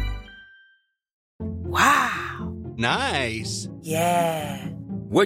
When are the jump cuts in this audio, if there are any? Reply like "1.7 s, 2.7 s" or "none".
1.2 s